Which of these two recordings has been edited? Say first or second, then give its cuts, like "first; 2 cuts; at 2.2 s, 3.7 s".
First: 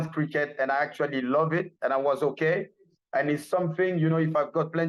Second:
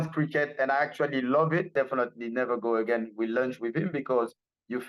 second; 1 cut; at 1.7 s